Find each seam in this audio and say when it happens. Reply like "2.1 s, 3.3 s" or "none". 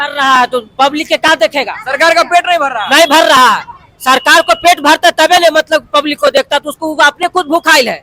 none